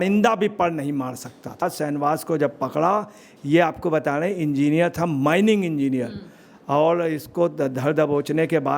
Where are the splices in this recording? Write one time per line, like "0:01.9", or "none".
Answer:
0:01.6

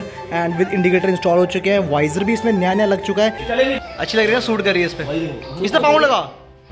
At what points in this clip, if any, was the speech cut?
0:03.4

